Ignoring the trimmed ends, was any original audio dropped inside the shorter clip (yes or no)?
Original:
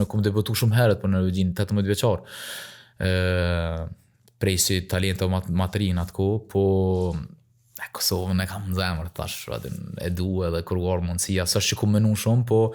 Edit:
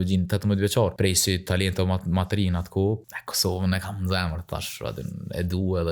yes